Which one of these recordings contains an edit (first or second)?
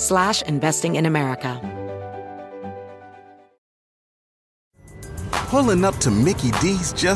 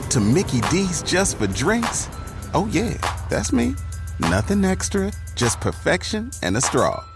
first